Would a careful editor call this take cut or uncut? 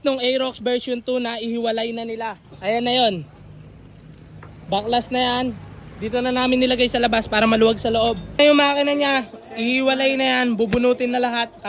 uncut